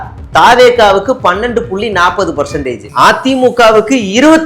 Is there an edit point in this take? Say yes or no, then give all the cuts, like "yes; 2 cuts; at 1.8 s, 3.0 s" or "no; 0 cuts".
yes; 1 cut; at 2.9 s